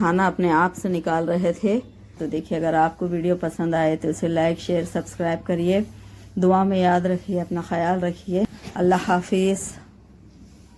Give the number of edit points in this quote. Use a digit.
2